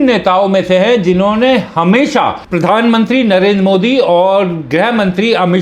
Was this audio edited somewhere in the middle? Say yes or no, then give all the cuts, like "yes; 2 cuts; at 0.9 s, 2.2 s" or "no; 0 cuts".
yes; 1 cut; at 2.4 s